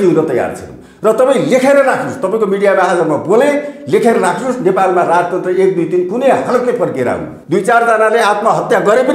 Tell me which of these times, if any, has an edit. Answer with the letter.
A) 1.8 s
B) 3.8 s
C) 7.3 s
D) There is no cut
C